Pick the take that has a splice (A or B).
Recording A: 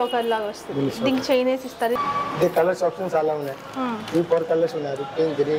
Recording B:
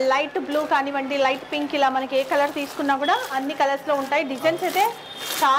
A